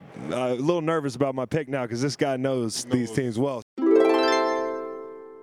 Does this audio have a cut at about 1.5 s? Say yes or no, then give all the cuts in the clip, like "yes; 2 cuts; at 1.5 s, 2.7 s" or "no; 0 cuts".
no; 1 cut; at 3.6 s